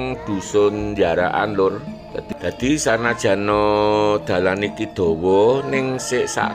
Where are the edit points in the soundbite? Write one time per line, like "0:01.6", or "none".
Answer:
0:02.2